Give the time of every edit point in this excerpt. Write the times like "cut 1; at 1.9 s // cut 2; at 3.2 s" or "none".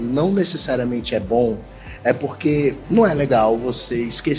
cut 1; at 2.8 s